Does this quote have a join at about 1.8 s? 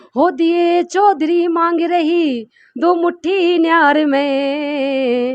no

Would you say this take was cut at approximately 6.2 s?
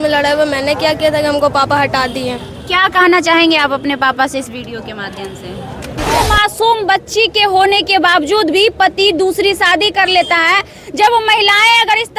yes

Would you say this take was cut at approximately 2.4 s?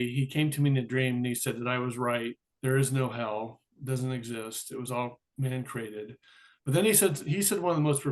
yes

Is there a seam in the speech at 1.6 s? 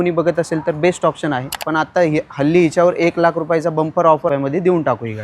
yes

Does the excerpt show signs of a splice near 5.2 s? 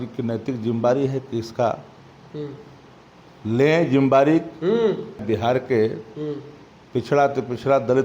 yes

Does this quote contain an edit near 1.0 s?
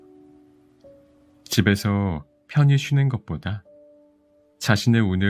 yes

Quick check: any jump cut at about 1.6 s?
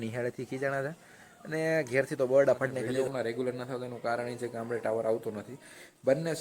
no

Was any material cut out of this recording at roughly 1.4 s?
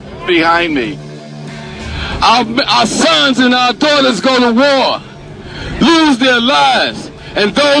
yes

